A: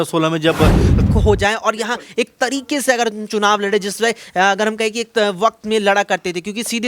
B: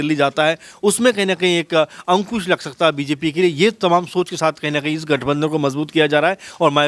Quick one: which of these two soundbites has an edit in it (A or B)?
A